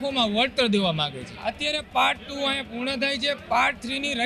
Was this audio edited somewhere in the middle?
yes; 1 cut; at 1.4 s

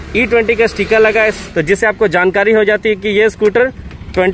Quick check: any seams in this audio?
yes; 1 cut; at 1.4 s

